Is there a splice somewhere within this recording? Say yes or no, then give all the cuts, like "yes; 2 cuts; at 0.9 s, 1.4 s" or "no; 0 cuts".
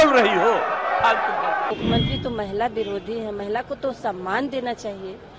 yes; 1 cut; at 1.7 s